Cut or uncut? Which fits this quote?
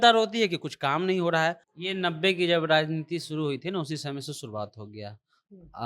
cut